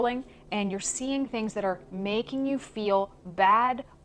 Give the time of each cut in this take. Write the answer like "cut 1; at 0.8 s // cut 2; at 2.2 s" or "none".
none